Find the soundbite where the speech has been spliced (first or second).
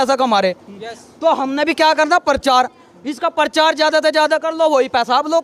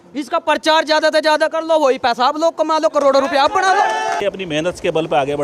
second